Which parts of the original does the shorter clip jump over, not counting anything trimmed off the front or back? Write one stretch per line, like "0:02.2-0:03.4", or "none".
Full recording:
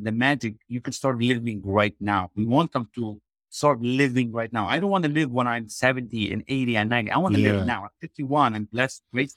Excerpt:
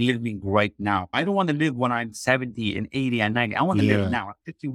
0:02.3-0:04.7

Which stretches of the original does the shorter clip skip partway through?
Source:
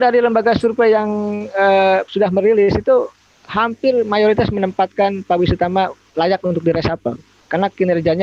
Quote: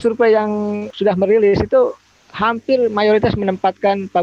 0:01.5-0:02.1

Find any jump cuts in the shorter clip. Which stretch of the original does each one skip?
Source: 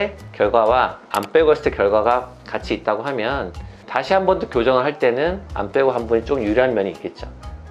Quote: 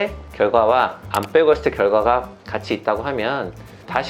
none

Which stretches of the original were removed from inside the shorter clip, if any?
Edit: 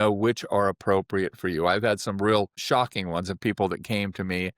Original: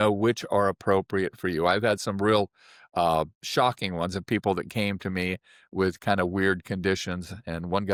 0:02.6-0:03.4

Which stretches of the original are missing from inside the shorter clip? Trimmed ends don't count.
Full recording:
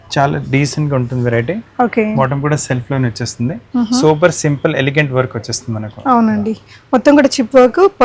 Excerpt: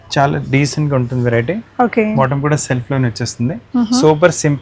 none

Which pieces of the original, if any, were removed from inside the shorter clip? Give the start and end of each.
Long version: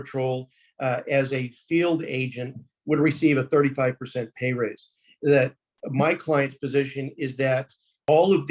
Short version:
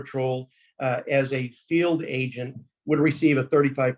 none

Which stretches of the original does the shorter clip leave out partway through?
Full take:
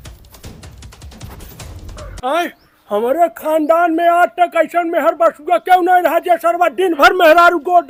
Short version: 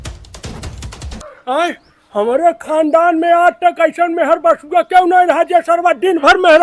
0:01.2-0:02.0

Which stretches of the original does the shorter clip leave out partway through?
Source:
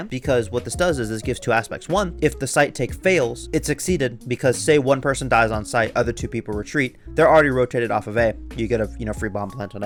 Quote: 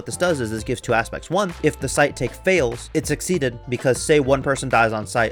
none

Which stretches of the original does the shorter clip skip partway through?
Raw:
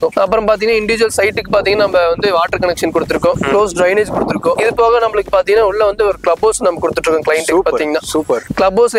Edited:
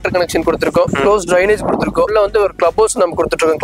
0:04.6-0:05.7

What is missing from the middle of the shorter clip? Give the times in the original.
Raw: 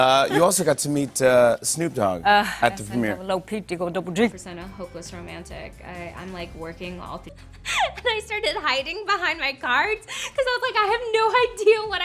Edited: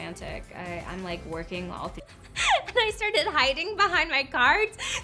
none

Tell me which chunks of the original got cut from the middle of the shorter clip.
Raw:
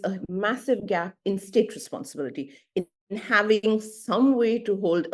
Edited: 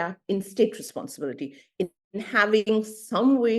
none

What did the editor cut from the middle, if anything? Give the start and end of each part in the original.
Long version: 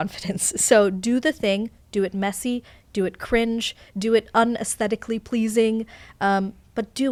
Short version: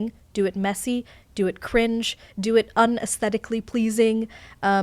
none

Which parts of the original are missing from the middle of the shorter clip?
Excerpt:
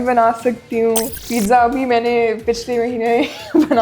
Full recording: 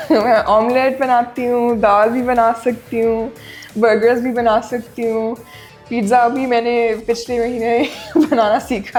0:03.4-0:05.8

